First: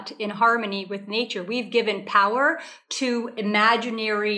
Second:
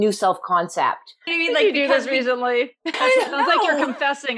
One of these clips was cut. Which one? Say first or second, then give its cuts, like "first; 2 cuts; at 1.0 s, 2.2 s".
second; 2 cuts; at 1.3 s, 3.0 s